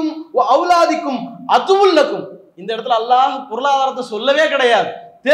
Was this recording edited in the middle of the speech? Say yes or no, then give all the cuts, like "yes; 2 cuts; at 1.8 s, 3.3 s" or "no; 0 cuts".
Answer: no; 0 cuts